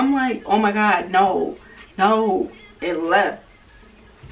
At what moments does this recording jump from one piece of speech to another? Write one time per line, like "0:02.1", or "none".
none